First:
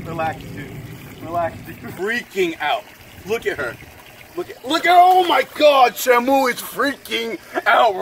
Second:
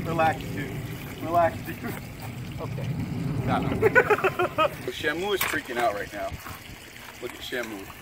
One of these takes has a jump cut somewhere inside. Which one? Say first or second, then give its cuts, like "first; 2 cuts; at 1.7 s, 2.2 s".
first; 1 cut; at 1.8 s